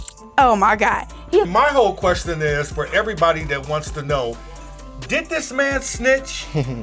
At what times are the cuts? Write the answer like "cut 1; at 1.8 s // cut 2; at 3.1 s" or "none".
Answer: cut 1; at 1.5 s